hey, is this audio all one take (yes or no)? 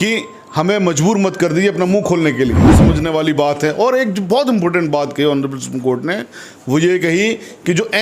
no